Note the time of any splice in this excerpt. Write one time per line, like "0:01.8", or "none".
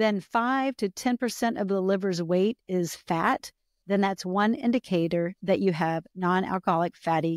none